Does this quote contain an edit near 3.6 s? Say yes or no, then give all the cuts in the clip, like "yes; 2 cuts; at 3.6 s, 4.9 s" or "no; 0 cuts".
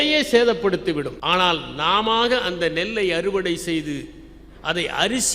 no; 1 cut; at 1.2 s